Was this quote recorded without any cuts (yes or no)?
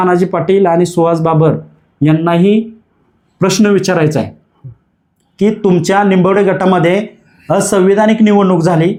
yes